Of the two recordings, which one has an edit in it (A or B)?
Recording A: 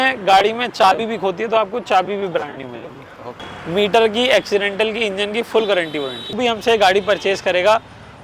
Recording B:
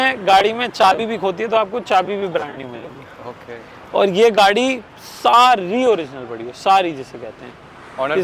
A